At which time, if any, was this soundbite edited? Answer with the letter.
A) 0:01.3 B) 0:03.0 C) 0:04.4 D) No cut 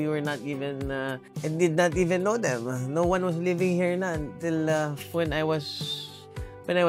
A